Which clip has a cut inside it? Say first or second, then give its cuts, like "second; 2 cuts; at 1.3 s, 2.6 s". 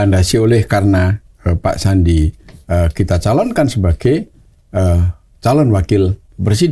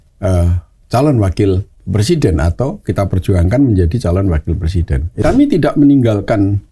second; 1 cut; at 5.2 s